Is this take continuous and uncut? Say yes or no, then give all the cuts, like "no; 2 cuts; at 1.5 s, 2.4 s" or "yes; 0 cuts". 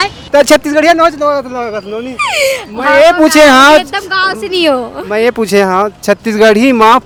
yes; 0 cuts